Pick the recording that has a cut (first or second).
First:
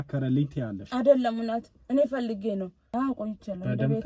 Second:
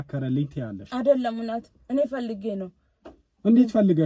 first